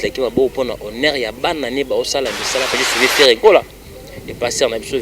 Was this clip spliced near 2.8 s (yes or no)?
yes